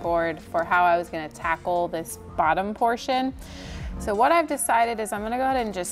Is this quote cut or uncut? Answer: uncut